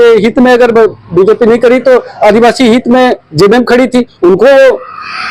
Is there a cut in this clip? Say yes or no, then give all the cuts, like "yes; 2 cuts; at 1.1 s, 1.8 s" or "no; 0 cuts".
no; 0 cuts